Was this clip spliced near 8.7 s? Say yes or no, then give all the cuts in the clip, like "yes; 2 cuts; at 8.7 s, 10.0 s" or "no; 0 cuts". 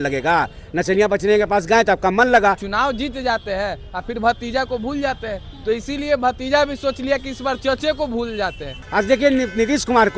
yes; 2 cuts; at 2.7 s, 8.7 s